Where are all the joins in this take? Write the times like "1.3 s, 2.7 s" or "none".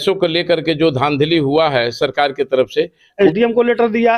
3.1 s